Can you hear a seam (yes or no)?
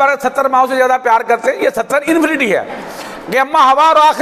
no